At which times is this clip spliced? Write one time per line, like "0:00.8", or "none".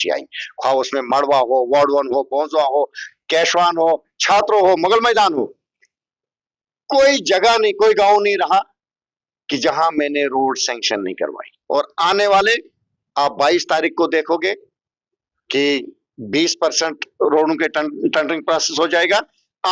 none

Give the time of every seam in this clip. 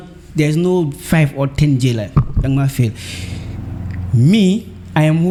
none

